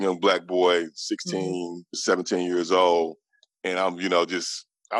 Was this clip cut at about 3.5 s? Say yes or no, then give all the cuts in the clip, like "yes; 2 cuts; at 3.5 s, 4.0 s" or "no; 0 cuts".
no; 1 cut; at 2.0 s